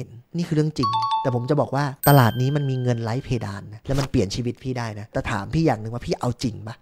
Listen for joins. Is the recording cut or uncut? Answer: cut